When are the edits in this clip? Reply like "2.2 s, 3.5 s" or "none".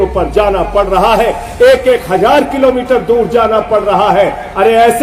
none